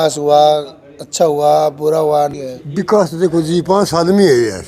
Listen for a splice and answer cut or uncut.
cut